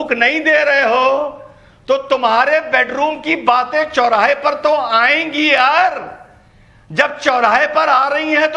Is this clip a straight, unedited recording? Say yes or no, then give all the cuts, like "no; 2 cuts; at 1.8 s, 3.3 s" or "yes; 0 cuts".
yes; 0 cuts